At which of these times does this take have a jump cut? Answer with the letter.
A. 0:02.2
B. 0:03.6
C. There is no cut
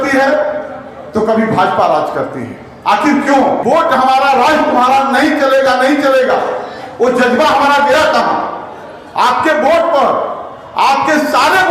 B